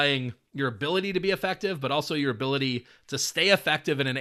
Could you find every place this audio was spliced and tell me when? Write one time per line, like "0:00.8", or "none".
none